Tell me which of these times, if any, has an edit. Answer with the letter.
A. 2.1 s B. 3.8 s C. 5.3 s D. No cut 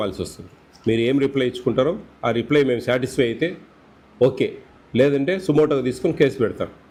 D